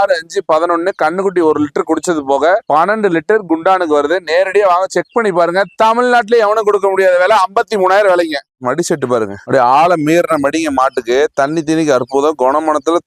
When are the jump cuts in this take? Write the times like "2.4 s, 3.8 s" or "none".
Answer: 8.5 s